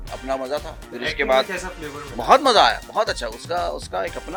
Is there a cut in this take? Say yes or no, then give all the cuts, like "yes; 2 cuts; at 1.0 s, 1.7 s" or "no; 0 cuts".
no; 0 cuts